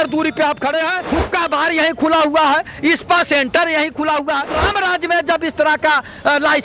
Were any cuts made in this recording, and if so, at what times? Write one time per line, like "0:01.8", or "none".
0:01.0
0:04.6